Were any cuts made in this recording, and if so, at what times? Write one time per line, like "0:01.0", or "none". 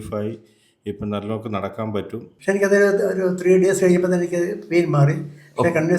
0:02.3